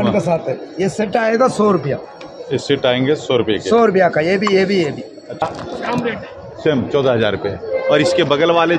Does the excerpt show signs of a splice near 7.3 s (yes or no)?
no